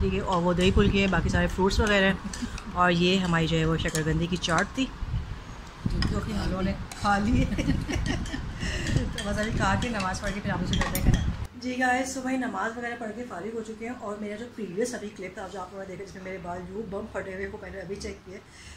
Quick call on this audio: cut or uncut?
uncut